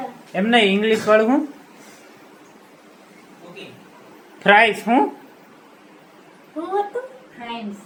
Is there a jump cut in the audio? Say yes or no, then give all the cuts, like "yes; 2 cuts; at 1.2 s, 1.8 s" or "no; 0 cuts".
no; 0 cuts